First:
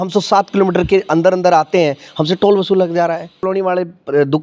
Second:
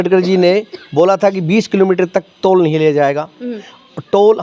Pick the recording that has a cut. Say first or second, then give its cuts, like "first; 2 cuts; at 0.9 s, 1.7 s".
first; 1 cut; at 3.4 s